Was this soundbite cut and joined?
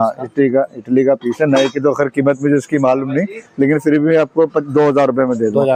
no; 0 cuts

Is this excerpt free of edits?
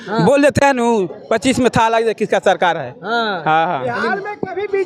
yes; 0 cuts

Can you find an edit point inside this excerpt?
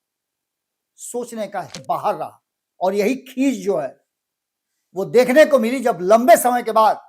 yes; 1 cut; at 1.7 s

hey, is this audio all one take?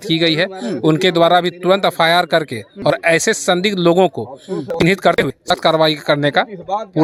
yes; 0 cuts

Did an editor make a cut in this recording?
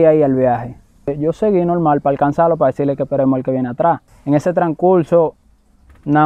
yes; 2 cuts; at 1.1 s, 4.1 s

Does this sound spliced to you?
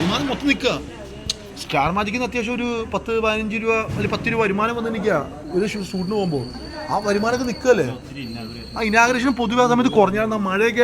no; 0 cuts

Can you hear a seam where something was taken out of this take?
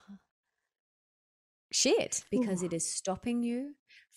yes; 1 cut; at 2.2 s

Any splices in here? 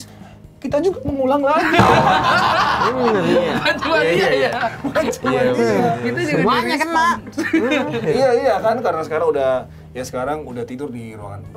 no; 0 cuts

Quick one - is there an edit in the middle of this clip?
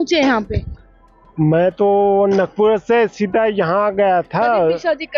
no; 0 cuts

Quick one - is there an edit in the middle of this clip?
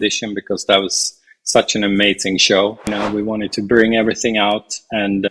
yes; 1 cut; at 3.0 s

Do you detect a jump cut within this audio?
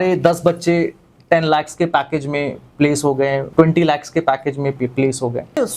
yes; 1 cut; at 3.5 s

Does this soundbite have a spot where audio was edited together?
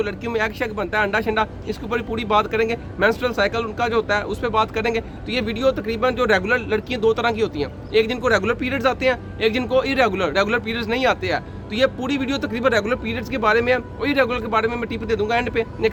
no; 0 cuts

